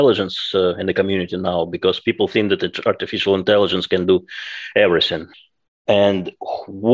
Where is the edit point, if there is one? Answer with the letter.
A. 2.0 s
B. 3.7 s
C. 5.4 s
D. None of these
C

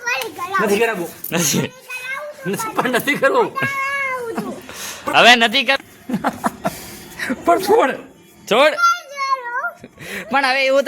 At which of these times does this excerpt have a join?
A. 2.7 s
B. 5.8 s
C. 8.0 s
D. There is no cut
B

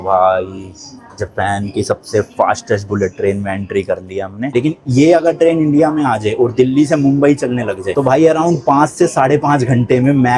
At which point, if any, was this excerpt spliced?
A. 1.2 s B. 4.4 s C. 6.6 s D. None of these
B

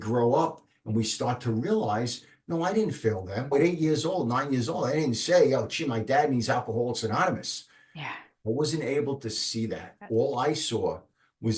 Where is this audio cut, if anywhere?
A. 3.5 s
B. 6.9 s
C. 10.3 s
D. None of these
A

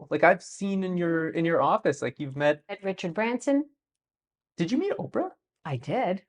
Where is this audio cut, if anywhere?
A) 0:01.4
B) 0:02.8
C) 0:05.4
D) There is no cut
B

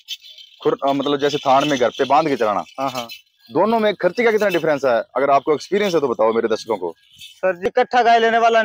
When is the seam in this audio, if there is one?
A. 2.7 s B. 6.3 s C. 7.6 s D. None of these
C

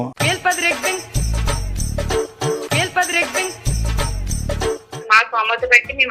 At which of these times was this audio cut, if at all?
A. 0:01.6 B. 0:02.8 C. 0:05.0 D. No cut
C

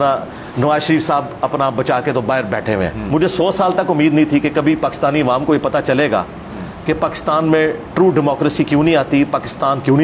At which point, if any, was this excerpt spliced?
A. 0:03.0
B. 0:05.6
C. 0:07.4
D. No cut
A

